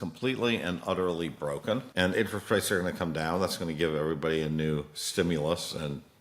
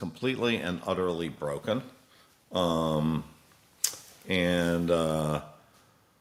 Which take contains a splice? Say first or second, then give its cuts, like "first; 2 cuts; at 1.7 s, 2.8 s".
first; 1 cut; at 1.9 s